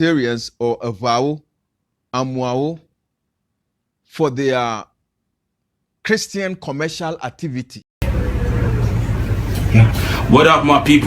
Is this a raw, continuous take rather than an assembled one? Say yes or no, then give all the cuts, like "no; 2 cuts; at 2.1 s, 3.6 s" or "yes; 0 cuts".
no; 1 cut; at 8.0 s